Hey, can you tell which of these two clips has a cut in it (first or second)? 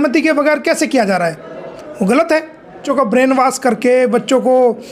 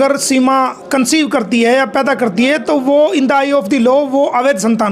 first